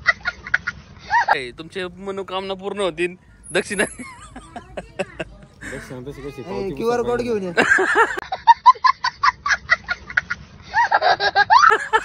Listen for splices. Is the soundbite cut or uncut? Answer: cut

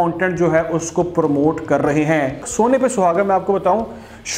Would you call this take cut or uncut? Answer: cut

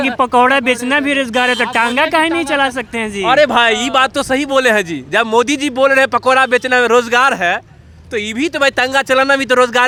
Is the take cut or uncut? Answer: uncut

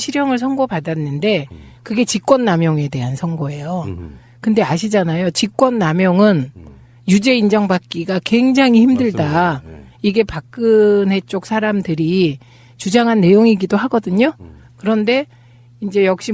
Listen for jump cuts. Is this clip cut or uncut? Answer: uncut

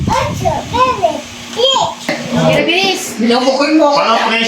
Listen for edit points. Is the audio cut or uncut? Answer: cut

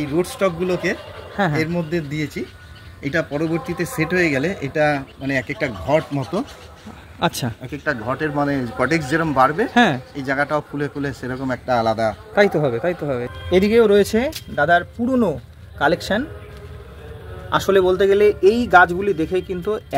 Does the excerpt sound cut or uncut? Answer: cut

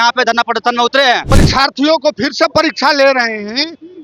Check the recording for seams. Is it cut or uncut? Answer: cut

